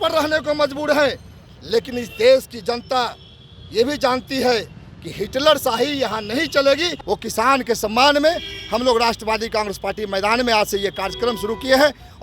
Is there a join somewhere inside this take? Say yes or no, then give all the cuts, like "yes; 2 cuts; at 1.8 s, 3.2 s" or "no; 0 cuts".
yes; 1 cut; at 6.9 s